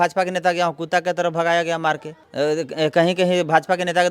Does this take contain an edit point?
yes; 1 cut; at 2.2 s

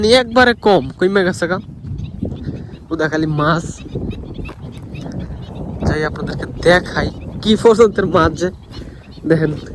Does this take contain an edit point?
no; 0 cuts

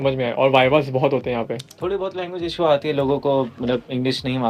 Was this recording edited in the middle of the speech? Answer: yes; 1 cut; at 1.6 s

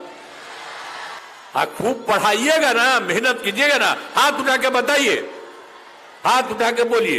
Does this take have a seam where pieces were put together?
no; 0 cuts

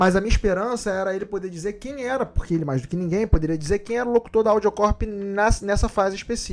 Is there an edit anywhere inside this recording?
no; 0 cuts

